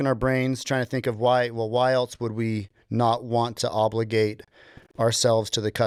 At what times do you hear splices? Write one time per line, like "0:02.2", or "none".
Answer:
none